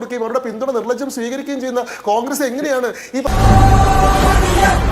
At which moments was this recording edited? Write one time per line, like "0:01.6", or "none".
0:03.3